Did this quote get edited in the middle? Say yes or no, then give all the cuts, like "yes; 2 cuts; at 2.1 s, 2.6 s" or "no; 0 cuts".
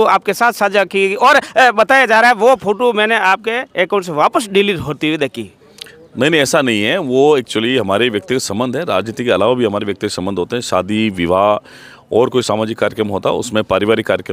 no; 0 cuts